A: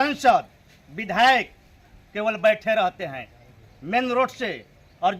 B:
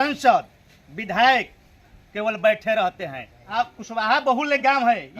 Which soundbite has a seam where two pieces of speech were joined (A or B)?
B